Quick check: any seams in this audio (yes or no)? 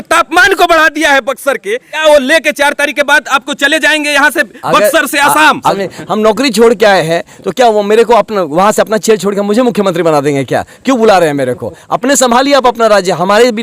yes